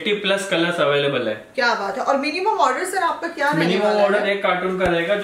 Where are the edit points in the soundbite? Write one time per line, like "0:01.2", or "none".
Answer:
none